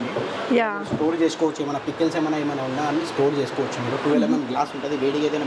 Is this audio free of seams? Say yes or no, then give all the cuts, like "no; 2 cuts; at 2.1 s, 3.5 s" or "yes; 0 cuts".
yes; 0 cuts